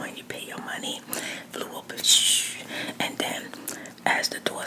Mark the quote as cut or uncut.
uncut